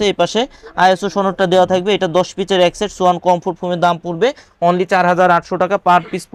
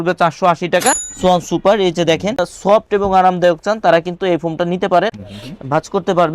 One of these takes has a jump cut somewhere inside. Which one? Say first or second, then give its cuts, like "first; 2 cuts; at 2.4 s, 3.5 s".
second; 3 cuts; at 1.1 s, 2.5 s, 5.2 s